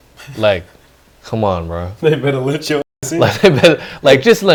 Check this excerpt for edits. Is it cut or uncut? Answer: uncut